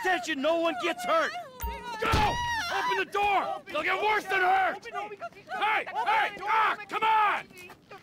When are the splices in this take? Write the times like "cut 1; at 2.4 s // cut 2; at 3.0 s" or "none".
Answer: none